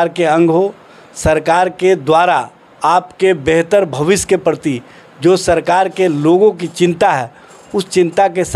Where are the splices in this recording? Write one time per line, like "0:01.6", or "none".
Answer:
none